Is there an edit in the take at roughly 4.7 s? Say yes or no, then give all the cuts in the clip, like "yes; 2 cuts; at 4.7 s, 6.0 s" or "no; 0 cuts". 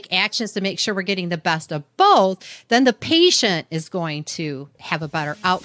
yes; 1 cut; at 4.7 s